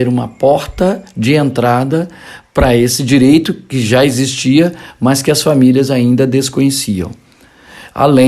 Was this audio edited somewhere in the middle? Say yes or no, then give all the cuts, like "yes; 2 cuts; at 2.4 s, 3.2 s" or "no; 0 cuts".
yes; 1 cut; at 3.0 s